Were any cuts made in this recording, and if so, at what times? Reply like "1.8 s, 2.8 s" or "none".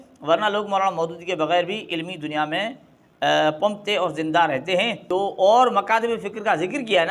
5.0 s